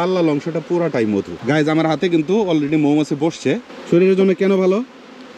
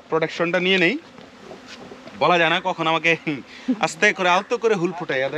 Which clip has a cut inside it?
first; 2 cuts; at 1.3 s, 3.7 s

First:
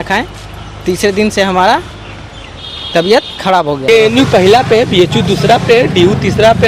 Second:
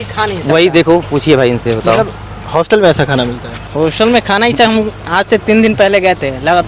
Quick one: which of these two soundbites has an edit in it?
first; 1 cut; at 3.9 s

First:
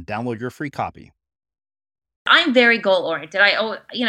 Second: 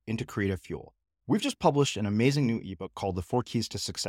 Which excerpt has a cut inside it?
first; 1 cut; at 2.3 s

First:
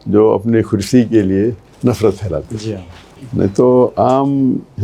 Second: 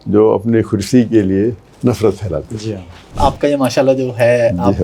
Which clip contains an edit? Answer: second; 1 cut; at 3.1 s

